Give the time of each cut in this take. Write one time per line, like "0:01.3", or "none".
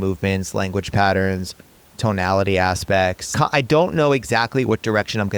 0:03.2